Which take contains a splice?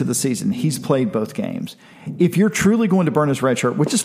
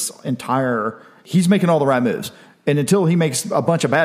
second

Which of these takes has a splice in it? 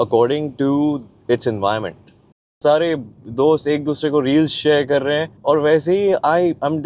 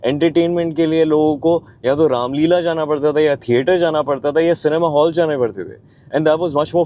first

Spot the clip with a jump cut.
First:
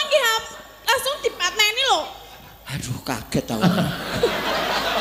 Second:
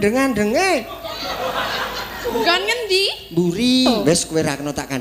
second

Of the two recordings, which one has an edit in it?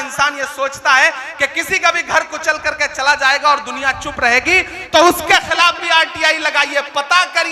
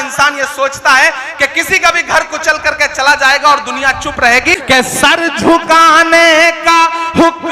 second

